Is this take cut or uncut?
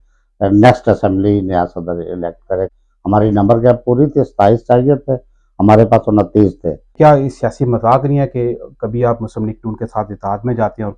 cut